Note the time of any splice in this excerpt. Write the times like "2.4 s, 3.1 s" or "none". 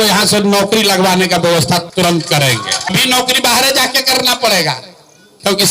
2.9 s